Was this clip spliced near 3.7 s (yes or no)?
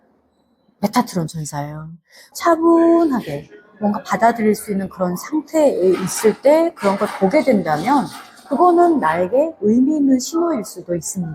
no